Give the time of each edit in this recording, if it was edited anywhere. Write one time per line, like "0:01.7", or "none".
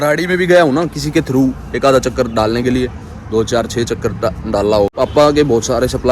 0:04.9